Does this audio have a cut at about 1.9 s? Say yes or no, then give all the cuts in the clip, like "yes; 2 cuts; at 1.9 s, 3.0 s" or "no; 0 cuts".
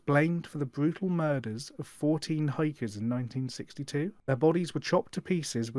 no; 1 cut; at 4.2 s